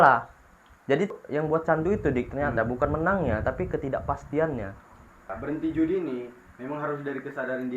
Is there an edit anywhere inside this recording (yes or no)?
yes